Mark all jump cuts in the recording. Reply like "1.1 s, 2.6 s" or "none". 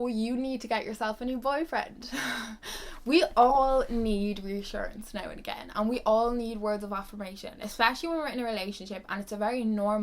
none